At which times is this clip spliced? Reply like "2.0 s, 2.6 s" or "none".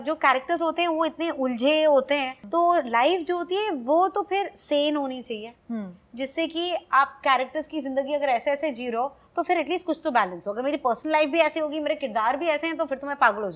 none